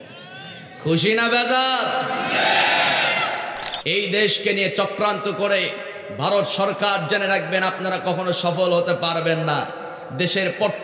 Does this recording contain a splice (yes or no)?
yes